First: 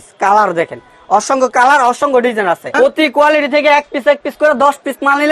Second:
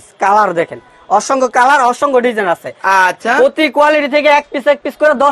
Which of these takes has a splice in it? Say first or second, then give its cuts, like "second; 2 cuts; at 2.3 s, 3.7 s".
first; 1 cut; at 2.7 s